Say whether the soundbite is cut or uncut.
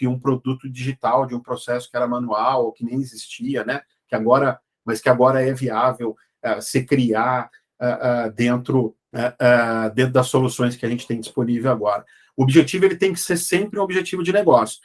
cut